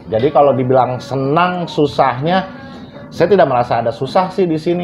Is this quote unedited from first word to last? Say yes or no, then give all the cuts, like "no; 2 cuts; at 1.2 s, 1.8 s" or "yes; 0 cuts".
yes; 0 cuts